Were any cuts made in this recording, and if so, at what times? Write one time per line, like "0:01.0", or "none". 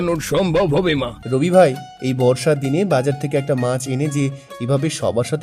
0:01.2